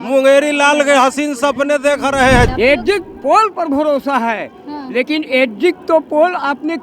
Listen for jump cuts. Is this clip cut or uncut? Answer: cut